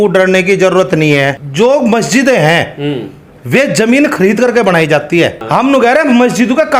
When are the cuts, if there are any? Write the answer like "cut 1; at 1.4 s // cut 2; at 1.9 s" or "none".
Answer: cut 1; at 1.4 s // cut 2; at 5.4 s

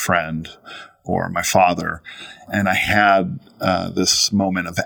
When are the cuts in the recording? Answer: cut 1; at 2.4 s

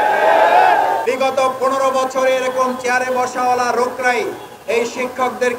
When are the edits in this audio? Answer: cut 1; at 1.0 s

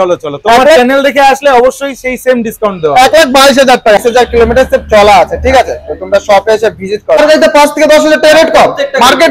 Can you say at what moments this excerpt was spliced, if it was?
cut 1; at 4.0 s // cut 2; at 7.2 s

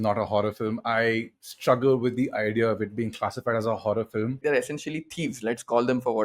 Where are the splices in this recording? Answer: cut 1; at 4.4 s

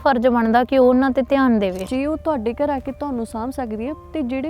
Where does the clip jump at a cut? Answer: cut 1; at 1.9 s

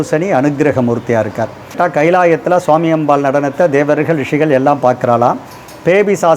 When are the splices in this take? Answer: cut 1; at 1.7 s

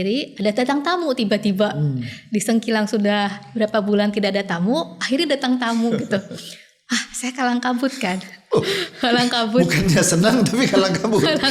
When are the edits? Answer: none

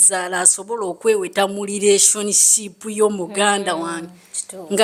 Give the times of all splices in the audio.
none

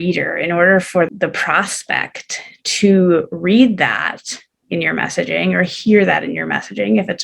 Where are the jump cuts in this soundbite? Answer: cut 1; at 1.1 s

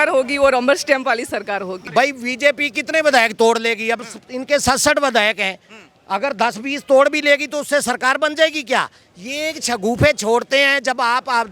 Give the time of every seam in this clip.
cut 1; at 1.8 s

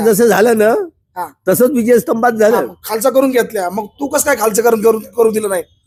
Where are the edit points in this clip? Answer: none

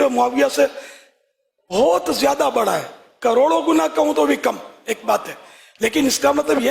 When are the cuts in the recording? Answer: none

